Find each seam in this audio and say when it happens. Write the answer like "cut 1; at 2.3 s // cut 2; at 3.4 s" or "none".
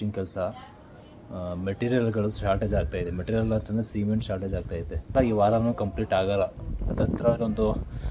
cut 1; at 5.1 s